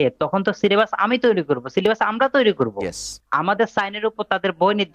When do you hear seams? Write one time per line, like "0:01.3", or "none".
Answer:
0:03.2